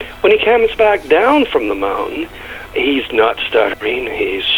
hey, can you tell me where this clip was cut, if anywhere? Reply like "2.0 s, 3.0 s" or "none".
2.7 s

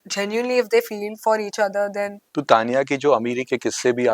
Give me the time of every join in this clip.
2.2 s

